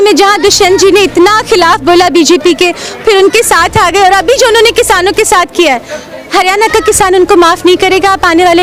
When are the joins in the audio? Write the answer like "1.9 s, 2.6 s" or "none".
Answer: none

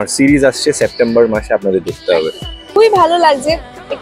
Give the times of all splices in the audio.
2.6 s

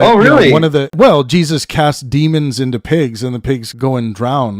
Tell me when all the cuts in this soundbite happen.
0.9 s, 3.7 s

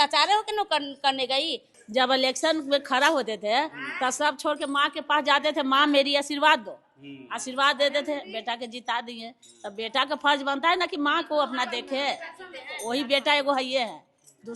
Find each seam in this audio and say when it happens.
1.7 s

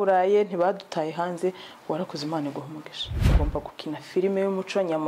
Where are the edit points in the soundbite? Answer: 3.2 s

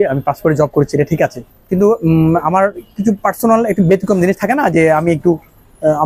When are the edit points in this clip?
none

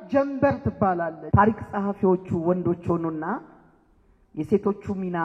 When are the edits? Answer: 1.2 s

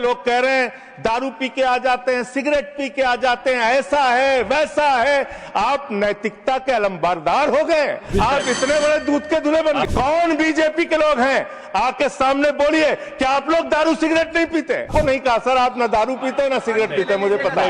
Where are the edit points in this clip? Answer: 8.0 s, 9.9 s, 14.9 s

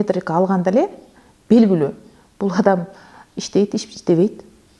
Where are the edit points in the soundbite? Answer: none

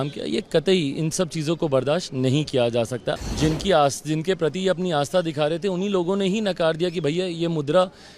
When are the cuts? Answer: 3.2 s

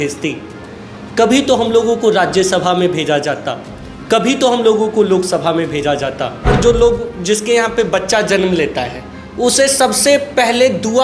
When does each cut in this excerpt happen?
6.5 s

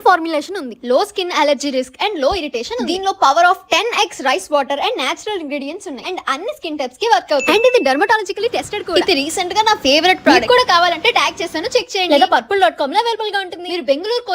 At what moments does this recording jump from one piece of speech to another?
7.4 s, 8.9 s, 10.3 s

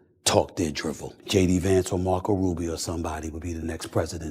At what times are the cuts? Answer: 1.1 s

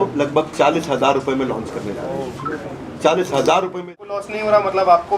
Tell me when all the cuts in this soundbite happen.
3.9 s

